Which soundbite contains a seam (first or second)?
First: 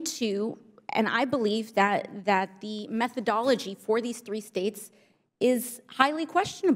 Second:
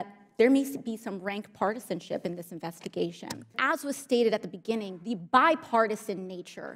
second